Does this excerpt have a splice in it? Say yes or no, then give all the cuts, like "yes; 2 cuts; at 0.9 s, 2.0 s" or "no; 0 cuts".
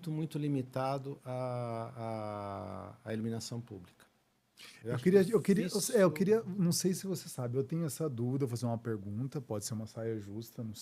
no; 0 cuts